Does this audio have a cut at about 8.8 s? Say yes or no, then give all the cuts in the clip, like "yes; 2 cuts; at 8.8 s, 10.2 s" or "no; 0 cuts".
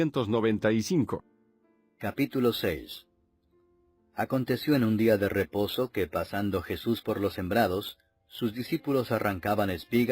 yes; 1 cut; at 8.8 s